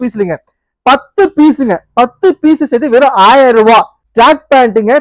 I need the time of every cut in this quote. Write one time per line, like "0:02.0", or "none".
0:04.0